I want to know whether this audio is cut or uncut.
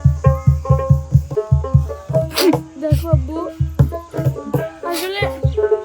cut